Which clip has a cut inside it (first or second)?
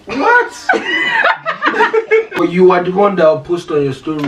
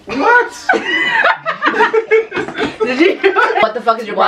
first